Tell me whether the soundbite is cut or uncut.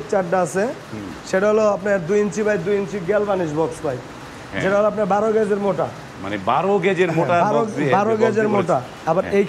uncut